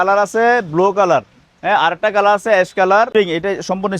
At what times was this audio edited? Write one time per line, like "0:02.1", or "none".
0:03.1